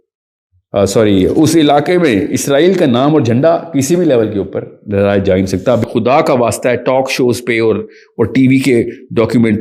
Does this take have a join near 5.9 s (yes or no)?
yes